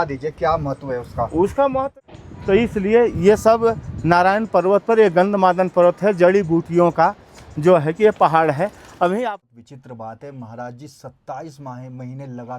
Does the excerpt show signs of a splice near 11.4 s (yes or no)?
no